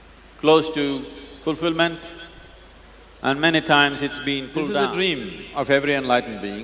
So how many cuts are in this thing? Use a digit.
1